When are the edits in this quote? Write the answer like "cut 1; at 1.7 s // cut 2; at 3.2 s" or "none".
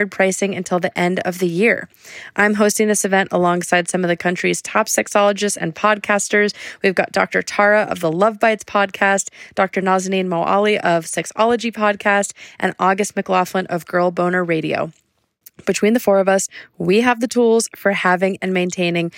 none